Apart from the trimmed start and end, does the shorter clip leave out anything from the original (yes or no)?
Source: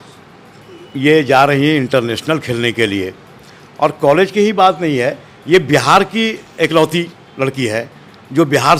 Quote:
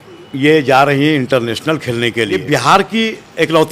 yes